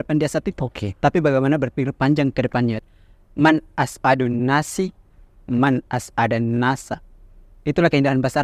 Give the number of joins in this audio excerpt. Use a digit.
1